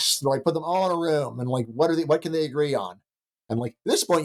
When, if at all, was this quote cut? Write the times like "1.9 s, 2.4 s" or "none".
none